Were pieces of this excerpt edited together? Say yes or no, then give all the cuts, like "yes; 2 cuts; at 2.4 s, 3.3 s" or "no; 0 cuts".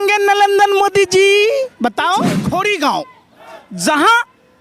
yes; 1 cut; at 2.4 s